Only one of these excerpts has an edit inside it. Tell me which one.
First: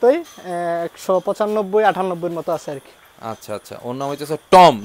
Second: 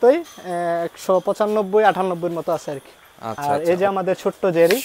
second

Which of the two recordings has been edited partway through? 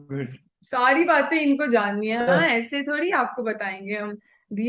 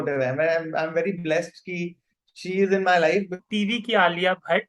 second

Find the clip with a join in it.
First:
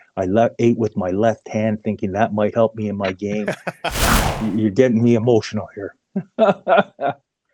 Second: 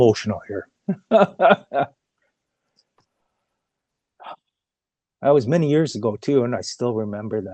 first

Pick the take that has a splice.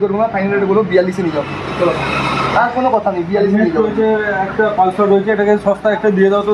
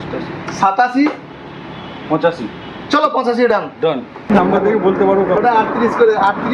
second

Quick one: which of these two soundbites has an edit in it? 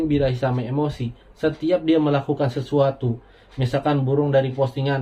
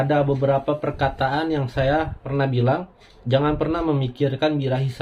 second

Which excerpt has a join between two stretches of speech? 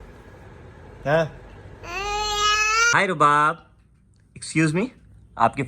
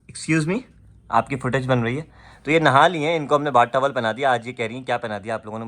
first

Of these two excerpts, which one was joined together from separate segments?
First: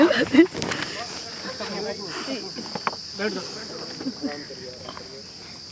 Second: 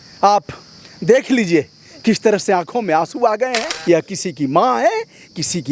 second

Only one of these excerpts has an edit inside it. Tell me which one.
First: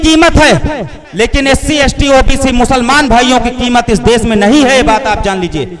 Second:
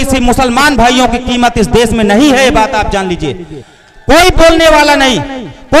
first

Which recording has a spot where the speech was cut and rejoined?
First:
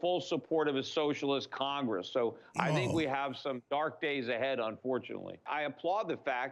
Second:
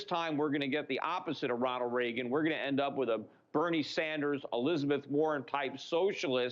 first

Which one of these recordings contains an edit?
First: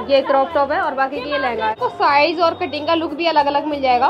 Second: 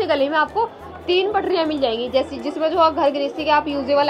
first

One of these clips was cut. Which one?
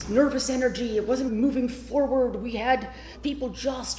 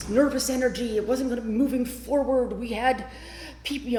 first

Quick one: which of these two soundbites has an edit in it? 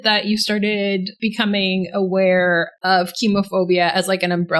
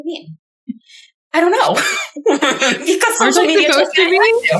first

